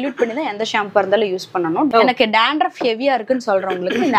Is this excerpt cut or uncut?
cut